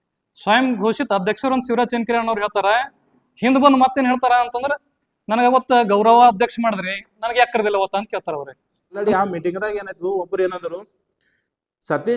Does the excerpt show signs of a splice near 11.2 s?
no; 1 cut; at 9.0 s

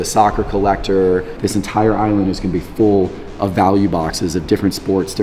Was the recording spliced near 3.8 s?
no; 1 cut; at 1.4 s

